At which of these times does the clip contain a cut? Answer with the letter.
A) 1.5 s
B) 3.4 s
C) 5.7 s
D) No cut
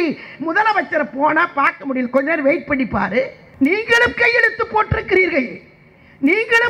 B